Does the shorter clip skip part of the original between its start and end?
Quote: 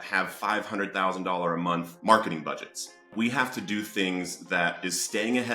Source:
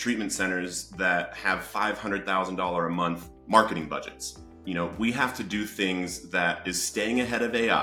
yes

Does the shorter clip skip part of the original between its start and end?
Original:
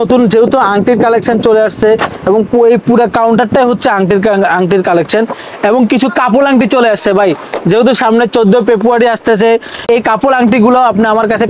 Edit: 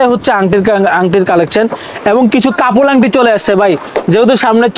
no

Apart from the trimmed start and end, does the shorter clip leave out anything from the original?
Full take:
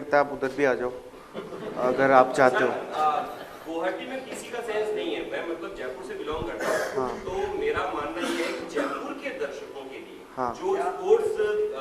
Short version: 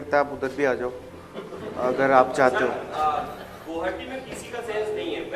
no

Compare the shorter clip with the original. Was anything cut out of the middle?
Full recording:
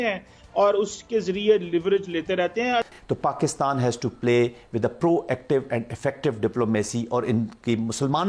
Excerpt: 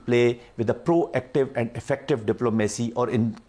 no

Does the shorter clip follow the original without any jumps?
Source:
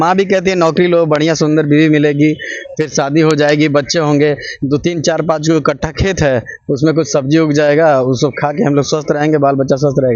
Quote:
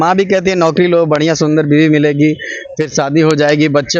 yes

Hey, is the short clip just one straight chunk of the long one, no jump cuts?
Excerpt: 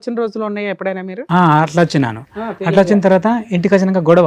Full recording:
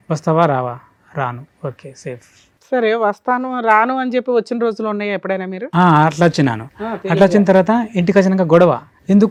yes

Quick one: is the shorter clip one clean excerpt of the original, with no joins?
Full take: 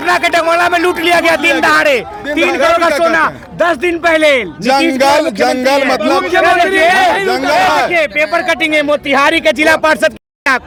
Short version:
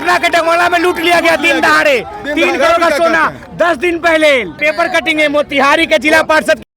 no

